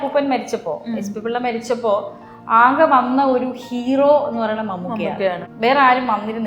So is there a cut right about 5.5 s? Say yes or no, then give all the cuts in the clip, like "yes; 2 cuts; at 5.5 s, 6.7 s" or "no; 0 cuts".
yes; 1 cut; at 5.5 s